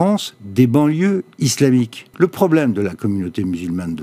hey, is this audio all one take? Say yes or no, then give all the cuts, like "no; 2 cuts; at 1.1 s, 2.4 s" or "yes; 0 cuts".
no; 1 cut; at 2.0 s